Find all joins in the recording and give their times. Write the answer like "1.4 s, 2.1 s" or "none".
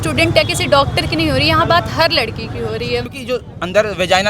3.1 s